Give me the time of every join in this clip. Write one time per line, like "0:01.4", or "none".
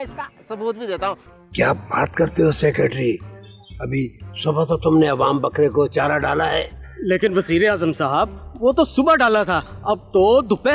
0:01.3